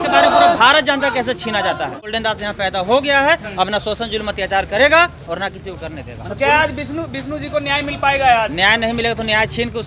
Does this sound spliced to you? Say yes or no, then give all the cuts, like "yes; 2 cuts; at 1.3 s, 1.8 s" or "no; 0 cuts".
yes; 1 cut; at 2.0 s